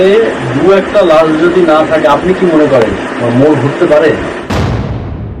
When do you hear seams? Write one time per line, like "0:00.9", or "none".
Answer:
0:04.4